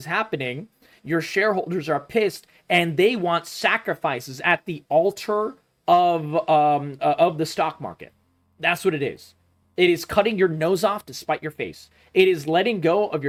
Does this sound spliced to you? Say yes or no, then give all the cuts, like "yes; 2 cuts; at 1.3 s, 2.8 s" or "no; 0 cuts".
no; 0 cuts